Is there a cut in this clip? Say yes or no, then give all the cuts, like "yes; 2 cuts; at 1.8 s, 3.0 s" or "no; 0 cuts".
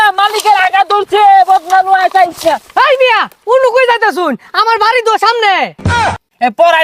yes; 1 cut; at 5.8 s